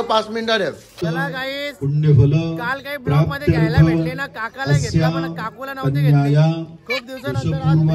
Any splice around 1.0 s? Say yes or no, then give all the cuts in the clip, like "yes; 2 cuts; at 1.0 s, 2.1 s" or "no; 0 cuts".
yes; 1 cut; at 1.0 s